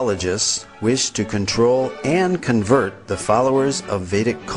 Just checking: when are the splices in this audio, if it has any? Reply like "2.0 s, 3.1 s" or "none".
3.6 s